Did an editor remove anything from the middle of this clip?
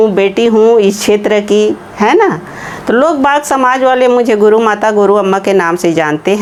no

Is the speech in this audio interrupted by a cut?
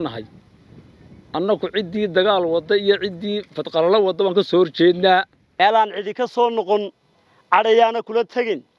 yes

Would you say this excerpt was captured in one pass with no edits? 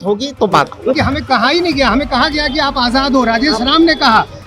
no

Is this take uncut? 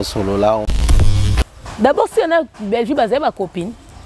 no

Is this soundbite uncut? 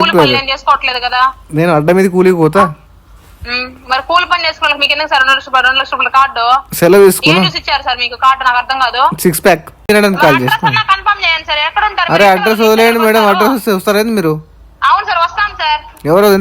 no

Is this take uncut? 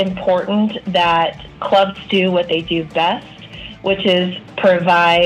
yes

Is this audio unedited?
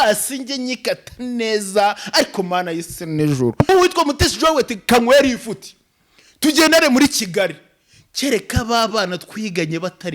no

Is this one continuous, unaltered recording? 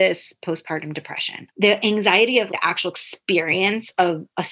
no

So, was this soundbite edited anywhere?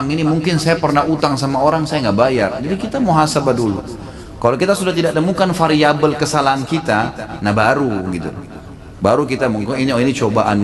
no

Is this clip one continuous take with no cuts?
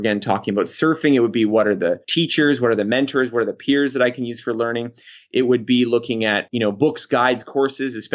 yes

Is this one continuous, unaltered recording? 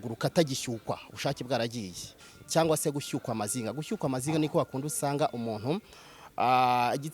no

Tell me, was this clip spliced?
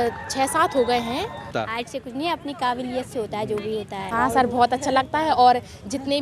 yes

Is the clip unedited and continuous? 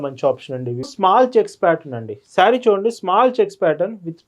no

